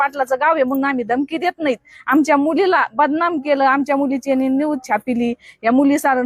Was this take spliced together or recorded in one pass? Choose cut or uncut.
uncut